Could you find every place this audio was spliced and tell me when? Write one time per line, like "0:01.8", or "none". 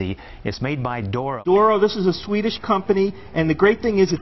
0:01.4